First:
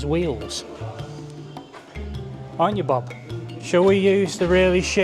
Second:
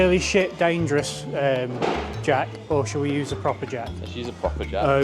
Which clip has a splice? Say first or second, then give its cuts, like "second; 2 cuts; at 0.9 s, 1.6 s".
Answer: first; 1 cut; at 3.5 s